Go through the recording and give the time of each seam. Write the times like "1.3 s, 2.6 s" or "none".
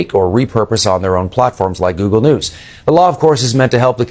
3.2 s